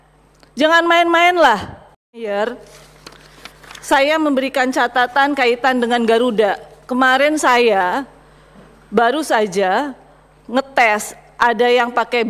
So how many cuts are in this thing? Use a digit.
1